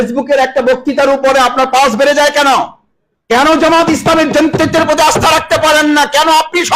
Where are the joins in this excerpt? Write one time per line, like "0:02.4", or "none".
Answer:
0:03.5